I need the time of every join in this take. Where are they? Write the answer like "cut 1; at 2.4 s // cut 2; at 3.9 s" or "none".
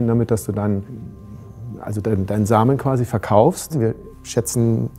cut 1; at 1.0 s // cut 2; at 3.8 s